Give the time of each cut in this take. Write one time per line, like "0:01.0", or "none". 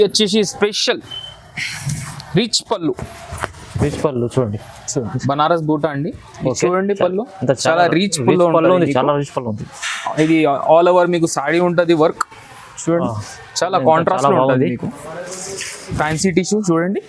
0:04.9
0:16.0